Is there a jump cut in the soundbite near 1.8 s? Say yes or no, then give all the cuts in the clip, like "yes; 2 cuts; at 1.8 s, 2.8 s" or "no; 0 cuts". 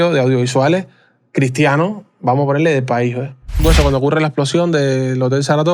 no; 1 cut; at 3.6 s